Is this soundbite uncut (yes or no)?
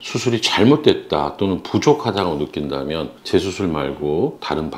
no